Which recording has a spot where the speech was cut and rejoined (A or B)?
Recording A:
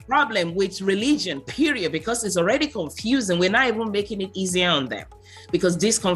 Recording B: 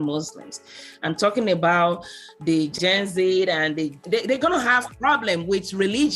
B